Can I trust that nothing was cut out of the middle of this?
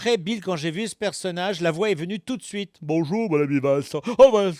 yes; 0 cuts

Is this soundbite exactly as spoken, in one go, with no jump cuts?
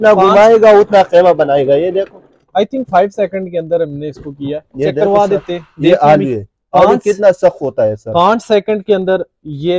yes; 0 cuts

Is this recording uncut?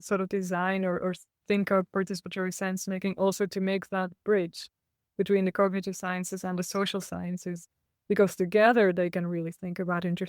yes; 0 cuts

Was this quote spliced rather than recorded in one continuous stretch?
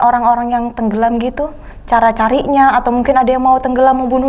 no; 0 cuts

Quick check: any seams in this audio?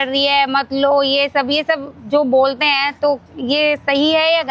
no; 0 cuts

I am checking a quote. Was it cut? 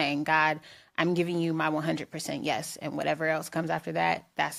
no; 0 cuts

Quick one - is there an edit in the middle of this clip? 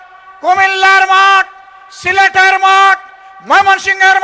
no; 0 cuts

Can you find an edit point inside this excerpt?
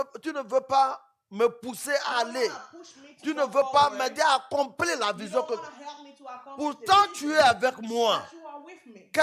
no; 0 cuts

